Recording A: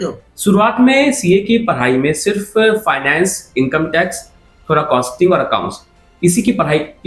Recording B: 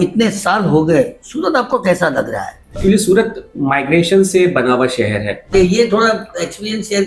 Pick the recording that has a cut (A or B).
B